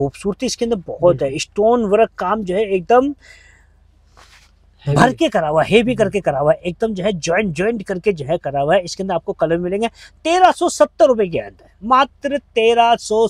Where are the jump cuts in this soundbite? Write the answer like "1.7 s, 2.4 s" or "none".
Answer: none